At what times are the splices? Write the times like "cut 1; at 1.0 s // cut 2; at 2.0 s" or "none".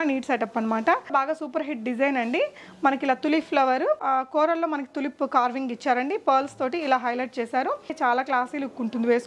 cut 1; at 1.1 s // cut 2; at 8.0 s